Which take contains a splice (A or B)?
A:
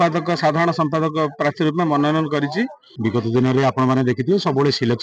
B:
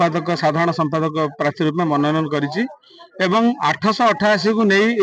A